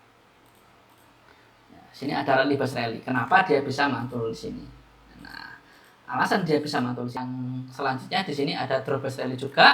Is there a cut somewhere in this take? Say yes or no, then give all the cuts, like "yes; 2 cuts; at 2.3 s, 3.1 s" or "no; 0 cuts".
yes; 1 cut; at 7.2 s